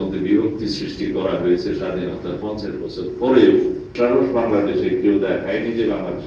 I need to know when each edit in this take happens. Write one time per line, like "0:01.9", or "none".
0:03.9